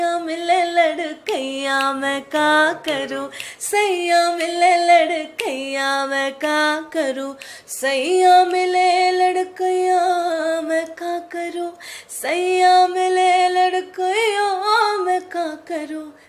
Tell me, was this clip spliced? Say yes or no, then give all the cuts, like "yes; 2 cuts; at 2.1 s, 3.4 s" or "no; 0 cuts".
no; 0 cuts